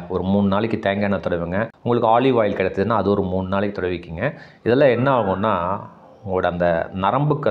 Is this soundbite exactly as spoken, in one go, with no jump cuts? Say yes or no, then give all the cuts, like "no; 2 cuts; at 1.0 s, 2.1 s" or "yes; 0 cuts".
yes; 0 cuts